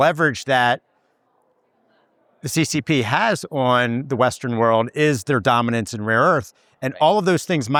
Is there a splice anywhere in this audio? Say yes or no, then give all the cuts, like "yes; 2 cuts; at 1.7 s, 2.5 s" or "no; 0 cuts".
no; 0 cuts